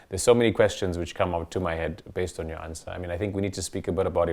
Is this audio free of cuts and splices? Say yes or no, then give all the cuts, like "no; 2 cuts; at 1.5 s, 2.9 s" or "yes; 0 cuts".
yes; 0 cuts